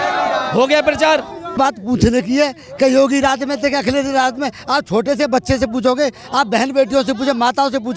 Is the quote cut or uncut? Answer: cut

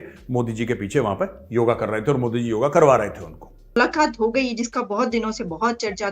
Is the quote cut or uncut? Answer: cut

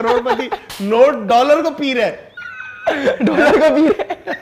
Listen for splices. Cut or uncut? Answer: uncut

